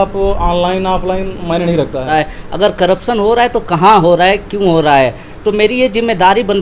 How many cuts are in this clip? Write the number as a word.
one